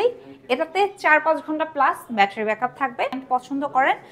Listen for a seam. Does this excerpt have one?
yes; 1 cut; at 3.2 s

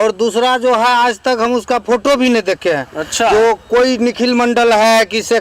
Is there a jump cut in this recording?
no; 0 cuts

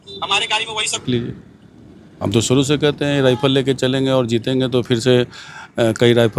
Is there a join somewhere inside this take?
yes; 1 cut; at 1.0 s

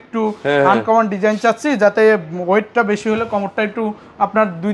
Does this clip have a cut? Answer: no; 0 cuts

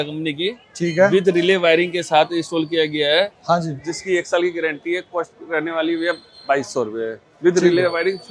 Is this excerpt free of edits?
yes; 0 cuts

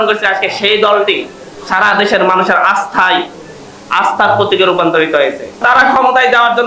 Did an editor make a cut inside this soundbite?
yes; 1 cut; at 5.6 s

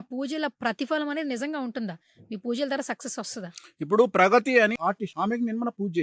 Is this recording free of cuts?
no; 1 cut; at 4.8 s

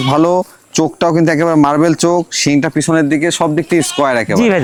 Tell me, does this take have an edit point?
no; 0 cuts

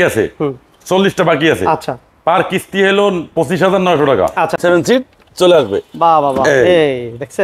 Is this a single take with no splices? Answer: no; 1 cut; at 4.6 s

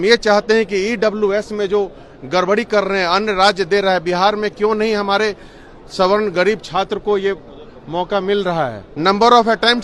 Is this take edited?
yes; 1 cut; at 8.9 s

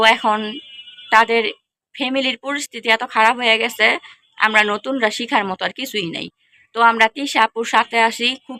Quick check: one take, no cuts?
yes; 0 cuts

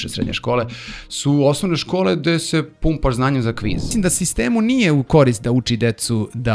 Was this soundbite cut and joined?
yes; 1 cut; at 3.9 s

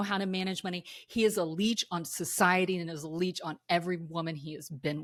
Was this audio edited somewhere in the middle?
no; 0 cuts

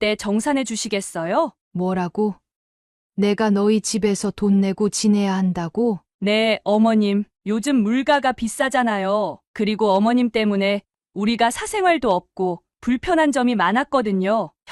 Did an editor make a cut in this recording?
yes; 1 cut; at 1.6 s

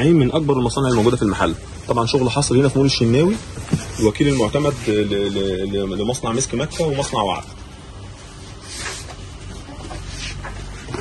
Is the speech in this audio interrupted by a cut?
no; 0 cuts

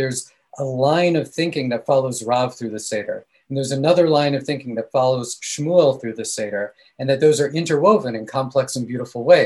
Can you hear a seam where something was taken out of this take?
no; 0 cuts

